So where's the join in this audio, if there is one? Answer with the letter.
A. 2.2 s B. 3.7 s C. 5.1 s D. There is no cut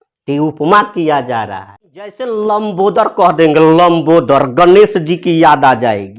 A